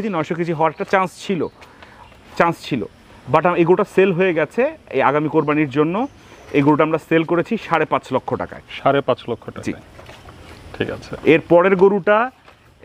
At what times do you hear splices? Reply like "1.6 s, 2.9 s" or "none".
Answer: none